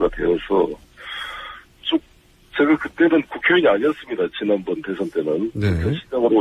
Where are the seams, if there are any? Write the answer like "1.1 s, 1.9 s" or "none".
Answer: 2.6 s